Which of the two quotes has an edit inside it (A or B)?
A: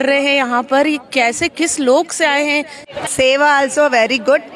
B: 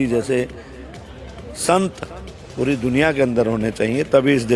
A